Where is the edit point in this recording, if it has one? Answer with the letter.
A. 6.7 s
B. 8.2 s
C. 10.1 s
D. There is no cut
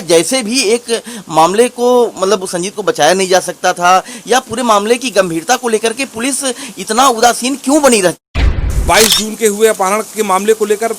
B